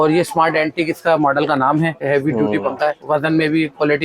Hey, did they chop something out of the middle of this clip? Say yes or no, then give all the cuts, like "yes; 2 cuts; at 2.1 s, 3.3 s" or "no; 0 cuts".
yes; 2 cuts; at 2.0 s, 3.0 s